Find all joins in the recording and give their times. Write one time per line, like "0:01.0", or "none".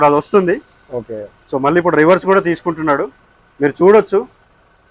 none